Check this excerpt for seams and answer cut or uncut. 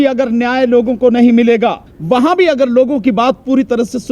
cut